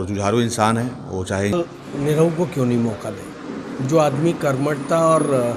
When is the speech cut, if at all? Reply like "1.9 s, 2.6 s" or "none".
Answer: 1.5 s